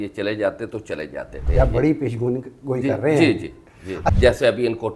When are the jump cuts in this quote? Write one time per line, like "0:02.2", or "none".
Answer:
0:01.4
0:04.0